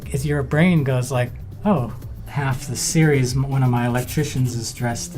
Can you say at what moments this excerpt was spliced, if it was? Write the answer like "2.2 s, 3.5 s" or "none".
1.4 s, 2.2 s